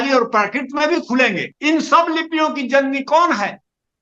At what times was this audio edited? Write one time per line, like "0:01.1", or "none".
0:01.5